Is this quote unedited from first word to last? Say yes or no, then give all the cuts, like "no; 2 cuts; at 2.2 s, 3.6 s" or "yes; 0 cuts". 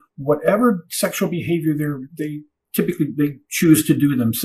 no; 1 cut; at 2.0 s